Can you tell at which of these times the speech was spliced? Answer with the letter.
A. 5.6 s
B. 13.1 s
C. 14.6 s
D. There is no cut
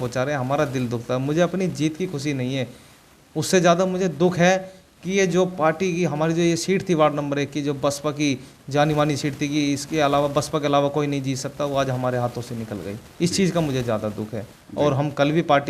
C